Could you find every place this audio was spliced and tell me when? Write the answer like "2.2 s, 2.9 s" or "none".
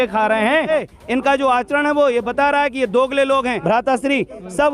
0.7 s, 3.6 s

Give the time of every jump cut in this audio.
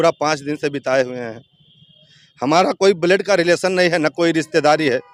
none

